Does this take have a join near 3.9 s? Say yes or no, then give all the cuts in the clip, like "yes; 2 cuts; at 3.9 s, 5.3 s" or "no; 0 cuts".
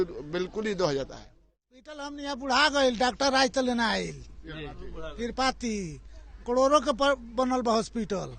no; 1 cut; at 2.0 s